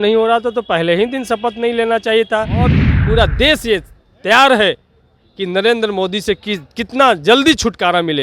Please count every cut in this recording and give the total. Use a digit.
1